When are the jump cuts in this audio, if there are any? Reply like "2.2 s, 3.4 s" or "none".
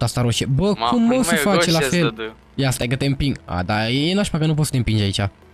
none